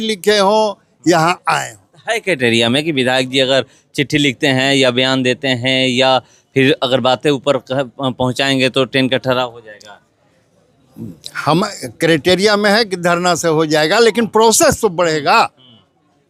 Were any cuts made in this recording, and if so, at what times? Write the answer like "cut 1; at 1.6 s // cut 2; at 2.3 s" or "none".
none